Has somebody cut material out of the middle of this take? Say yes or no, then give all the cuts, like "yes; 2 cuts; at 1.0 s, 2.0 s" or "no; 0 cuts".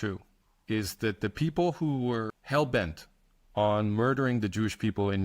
yes; 1 cut; at 2.4 s